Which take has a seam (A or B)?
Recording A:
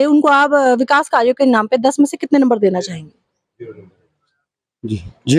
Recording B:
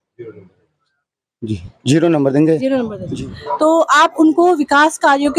B